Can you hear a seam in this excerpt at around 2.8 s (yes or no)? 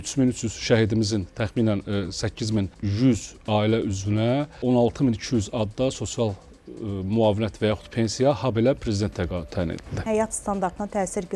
yes